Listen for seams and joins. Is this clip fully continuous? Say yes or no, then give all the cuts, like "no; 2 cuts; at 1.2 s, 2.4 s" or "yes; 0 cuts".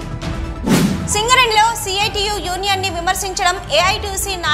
no; 1 cut; at 0.9 s